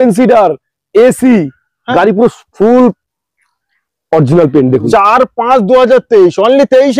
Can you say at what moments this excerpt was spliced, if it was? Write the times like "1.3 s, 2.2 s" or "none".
4.9 s

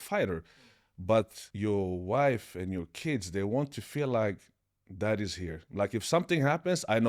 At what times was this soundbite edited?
1.4 s, 5.6 s

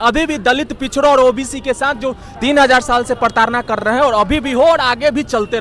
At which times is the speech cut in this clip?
none

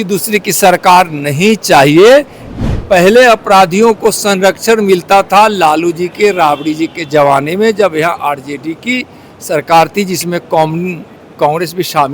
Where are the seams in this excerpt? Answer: 2.4 s

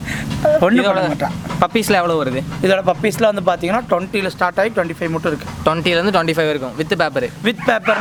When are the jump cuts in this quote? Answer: none

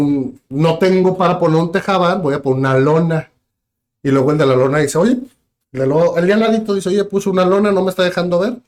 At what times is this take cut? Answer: none

